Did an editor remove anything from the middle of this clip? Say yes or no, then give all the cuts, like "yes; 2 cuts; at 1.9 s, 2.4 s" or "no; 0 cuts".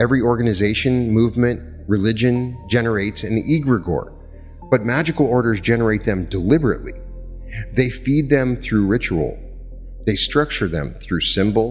no; 0 cuts